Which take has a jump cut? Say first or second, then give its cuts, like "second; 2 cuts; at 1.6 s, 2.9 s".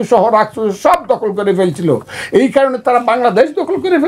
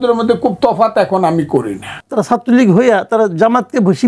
second; 1 cut; at 2.0 s